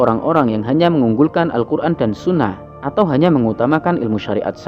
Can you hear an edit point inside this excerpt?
no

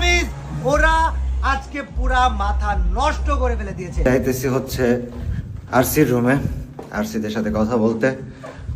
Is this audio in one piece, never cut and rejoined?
no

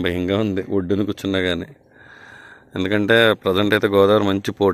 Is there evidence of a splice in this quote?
no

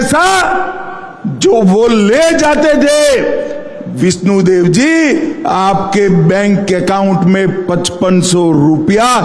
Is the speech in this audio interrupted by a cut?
no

